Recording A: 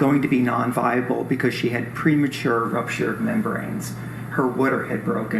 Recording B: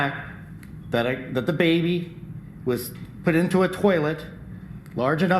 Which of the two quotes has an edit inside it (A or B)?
A